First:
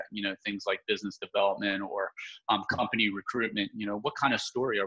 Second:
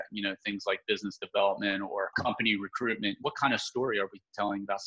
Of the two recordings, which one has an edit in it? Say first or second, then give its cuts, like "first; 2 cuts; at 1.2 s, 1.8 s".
second; 2 cuts; at 2.1 s, 3.2 s